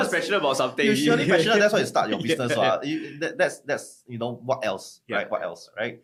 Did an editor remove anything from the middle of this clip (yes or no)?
no